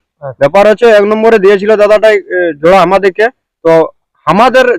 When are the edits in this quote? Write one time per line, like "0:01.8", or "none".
none